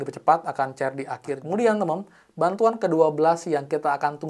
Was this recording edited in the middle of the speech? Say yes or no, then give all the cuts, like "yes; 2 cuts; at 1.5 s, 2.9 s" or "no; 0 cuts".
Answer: yes; 1 cut; at 1.3 s